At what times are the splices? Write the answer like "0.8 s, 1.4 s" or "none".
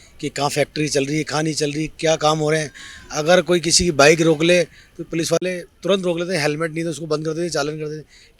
none